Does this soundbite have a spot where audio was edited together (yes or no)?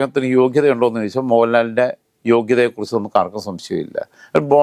no